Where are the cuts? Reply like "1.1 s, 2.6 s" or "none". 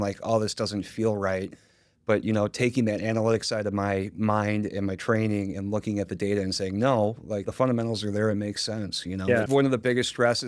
7.5 s, 9.5 s